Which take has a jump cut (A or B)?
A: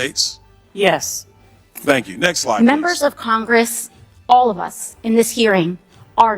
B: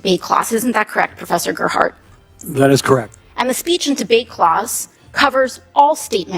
A